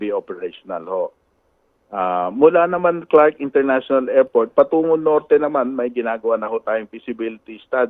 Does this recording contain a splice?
no; 0 cuts

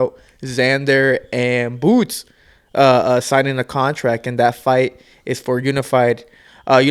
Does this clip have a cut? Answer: no; 0 cuts

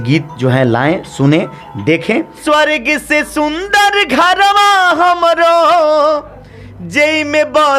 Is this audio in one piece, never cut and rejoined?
no; 1 cut; at 2.4 s

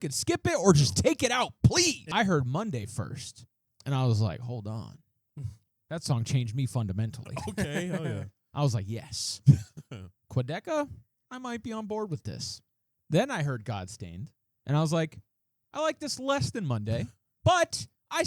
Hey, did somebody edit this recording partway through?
yes; 1 cut; at 2.0 s

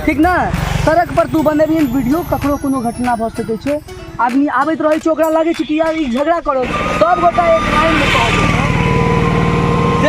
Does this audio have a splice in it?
yes; 1 cut; at 6.7 s

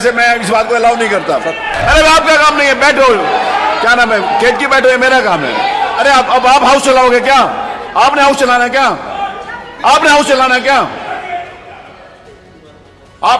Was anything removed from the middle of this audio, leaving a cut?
yes; 1 cut; at 1.7 s

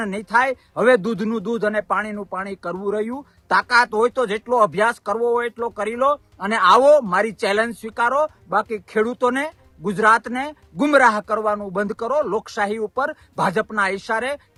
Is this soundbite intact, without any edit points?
yes; 0 cuts

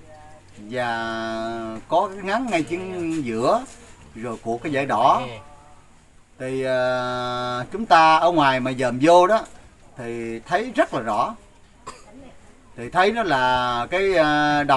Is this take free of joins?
yes; 0 cuts

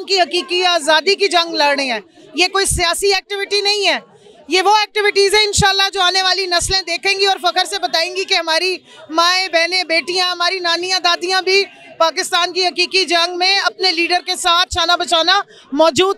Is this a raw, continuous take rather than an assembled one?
yes; 0 cuts

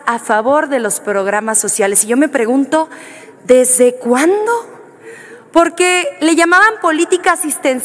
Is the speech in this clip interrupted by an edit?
no; 0 cuts

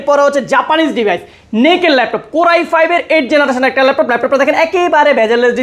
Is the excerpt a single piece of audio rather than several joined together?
yes; 0 cuts

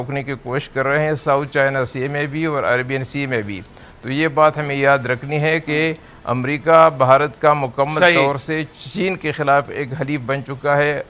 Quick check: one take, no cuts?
yes; 0 cuts

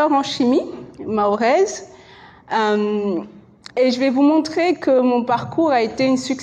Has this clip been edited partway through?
no; 0 cuts

